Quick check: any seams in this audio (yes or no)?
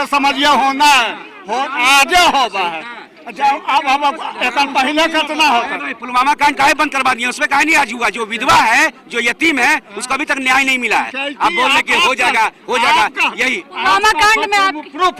no